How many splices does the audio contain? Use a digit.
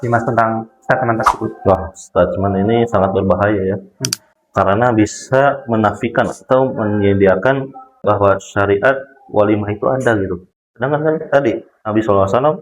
1